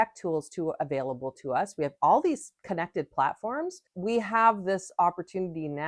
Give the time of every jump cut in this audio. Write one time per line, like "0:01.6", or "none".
0:03.9